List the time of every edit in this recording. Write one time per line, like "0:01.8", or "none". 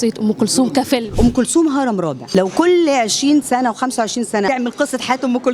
0:01.2
0:02.2
0:04.5

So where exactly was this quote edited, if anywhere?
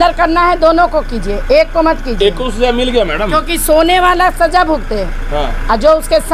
none

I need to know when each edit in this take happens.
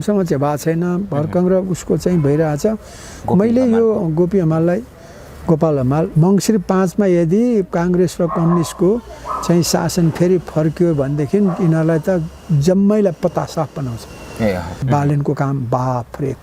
0:06.1
0:14.8

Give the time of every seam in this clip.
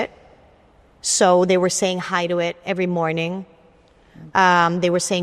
none

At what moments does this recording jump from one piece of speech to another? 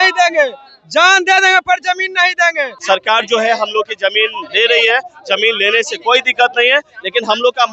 0:02.7

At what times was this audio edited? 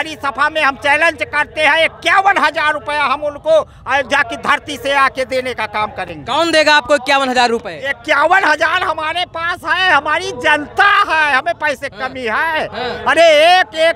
none

